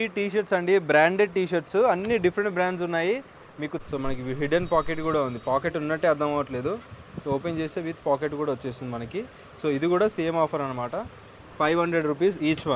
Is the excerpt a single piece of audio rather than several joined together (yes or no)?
no